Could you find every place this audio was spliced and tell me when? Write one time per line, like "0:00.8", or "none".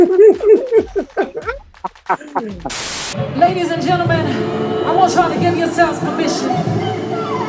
0:03.1

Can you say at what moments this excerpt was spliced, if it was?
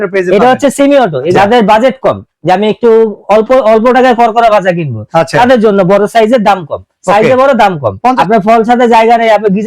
0:01.3
0:08.2

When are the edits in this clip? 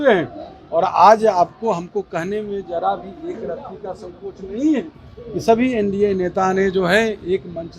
none

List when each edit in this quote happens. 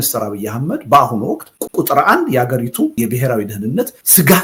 none

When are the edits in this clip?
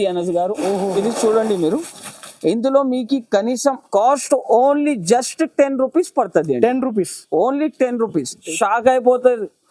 0:03.8
0:08.5

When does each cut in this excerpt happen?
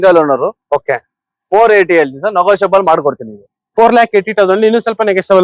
none

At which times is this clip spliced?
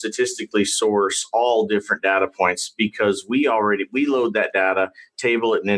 none

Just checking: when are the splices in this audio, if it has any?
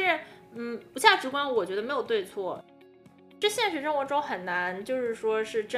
0:03.0

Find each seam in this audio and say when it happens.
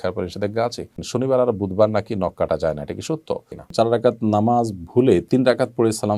0:01.0
0:03.7

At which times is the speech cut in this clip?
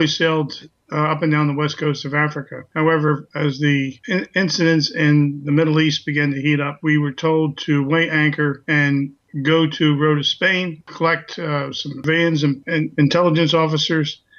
none

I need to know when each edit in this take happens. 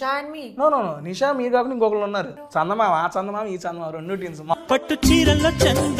0:02.4
0:04.5

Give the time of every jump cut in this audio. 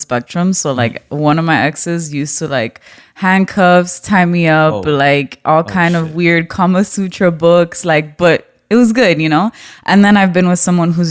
none

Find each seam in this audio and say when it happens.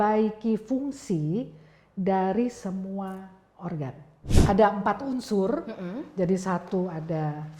0:04.2

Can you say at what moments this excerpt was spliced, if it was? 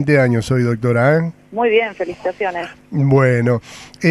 0:02.8

